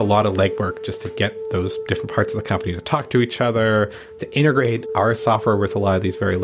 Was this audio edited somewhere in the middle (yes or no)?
no